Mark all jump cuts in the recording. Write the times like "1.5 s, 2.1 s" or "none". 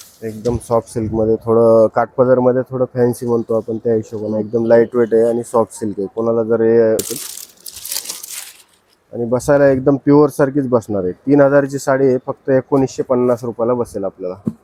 7.1 s